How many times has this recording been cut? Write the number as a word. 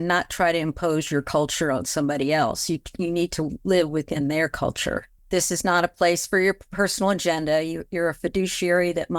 one